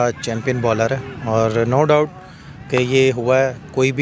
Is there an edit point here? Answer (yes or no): no